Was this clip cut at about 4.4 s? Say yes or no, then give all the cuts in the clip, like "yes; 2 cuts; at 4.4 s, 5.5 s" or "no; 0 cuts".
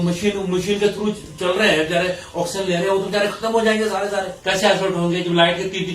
yes; 1 cut; at 4.4 s